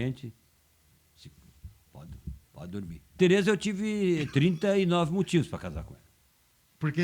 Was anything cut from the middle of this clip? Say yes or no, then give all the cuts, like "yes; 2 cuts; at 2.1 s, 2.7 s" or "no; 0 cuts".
yes; 1 cut; at 3.2 s